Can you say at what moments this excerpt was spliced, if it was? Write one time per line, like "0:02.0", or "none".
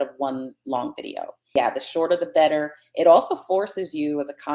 0:01.4